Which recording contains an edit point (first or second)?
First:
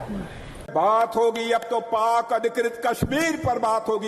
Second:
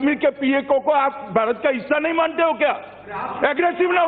first